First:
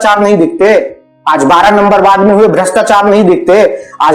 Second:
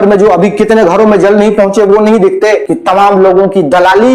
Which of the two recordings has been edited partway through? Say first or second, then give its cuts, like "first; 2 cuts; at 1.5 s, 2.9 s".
second; 1 cut; at 2.7 s